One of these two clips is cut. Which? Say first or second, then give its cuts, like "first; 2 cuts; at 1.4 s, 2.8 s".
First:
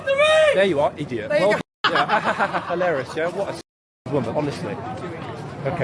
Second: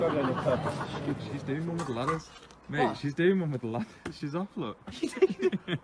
second; 1 cut; at 1.3 s